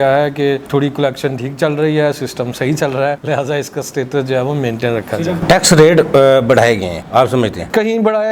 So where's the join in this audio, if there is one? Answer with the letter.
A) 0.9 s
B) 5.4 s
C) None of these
C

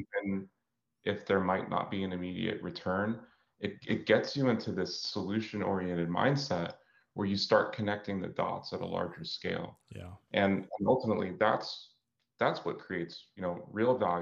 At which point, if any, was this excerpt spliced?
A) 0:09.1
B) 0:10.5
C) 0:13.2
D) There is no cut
C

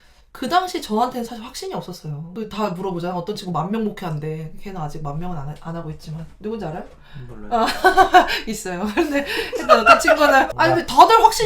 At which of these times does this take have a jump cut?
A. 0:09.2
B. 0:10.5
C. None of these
B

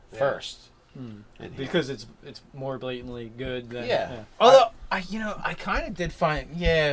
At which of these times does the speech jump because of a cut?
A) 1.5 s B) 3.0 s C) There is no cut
A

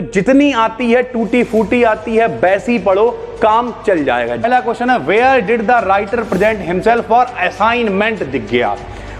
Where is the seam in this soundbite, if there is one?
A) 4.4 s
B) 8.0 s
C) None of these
A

